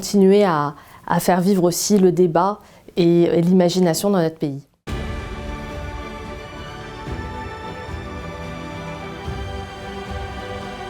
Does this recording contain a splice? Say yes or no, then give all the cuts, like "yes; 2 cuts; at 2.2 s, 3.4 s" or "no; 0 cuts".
yes; 1 cut; at 4.7 s